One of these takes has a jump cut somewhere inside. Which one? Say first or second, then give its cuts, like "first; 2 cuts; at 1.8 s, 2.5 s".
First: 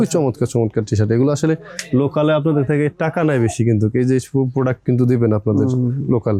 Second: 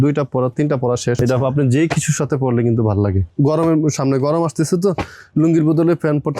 second; 2 cuts; at 1.2 s, 3.2 s